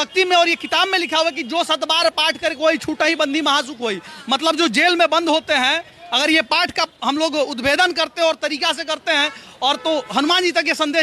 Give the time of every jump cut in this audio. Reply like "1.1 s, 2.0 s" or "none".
none